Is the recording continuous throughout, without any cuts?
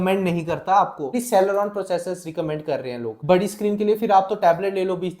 no; 2 cuts; at 1.2 s, 3.1 s

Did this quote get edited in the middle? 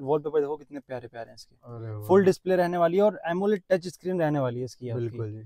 no; 0 cuts

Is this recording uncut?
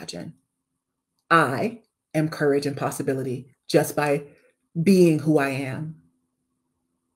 yes; 0 cuts

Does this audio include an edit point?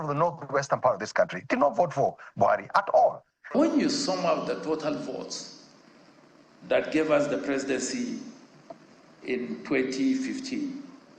yes; 1 cut; at 3.5 s

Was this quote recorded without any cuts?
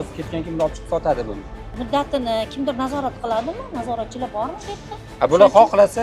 no; 2 cuts; at 1.7 s, 5.0 s

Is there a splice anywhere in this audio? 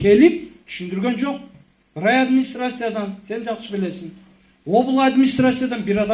no; 0 cuts

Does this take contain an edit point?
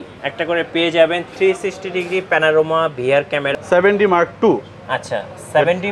yes; 1 cut; at 3.5 s

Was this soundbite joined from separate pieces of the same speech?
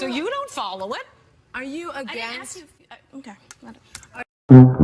no; 0 cuts

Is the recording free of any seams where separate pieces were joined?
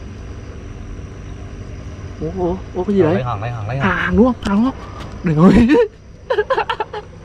yes; 0 cuts

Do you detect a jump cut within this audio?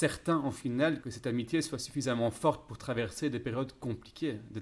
yes; 1 cut; at 1.1 s

